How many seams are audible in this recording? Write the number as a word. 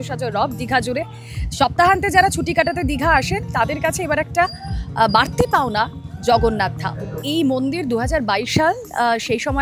one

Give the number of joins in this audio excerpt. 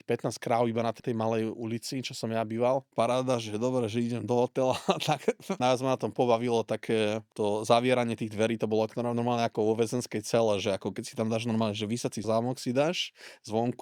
five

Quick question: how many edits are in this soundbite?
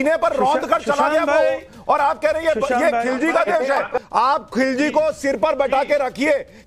one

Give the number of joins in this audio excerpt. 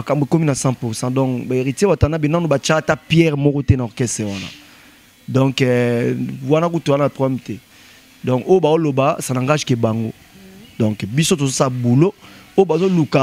zero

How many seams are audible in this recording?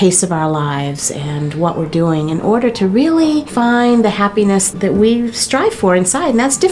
two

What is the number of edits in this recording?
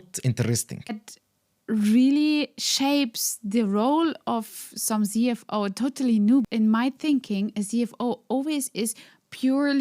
two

